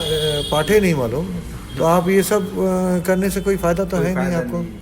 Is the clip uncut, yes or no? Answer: yes